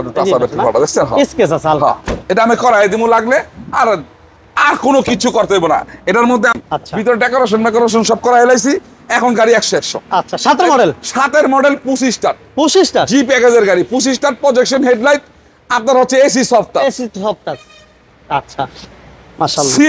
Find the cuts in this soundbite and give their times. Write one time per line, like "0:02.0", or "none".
0:06.6